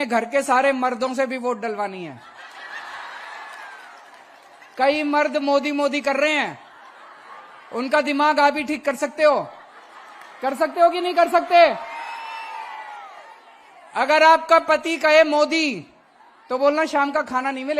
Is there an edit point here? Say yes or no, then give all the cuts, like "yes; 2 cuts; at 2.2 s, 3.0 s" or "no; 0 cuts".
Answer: no; 0 cuts